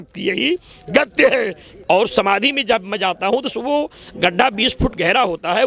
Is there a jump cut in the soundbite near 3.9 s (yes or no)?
no